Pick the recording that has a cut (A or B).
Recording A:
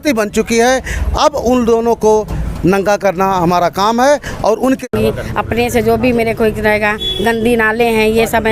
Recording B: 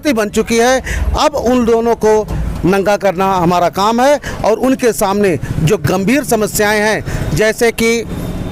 A